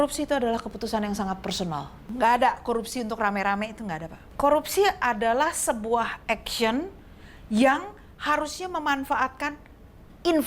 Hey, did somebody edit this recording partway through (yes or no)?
yes